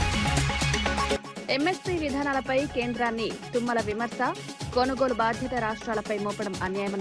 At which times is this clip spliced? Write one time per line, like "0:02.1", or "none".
0:01.1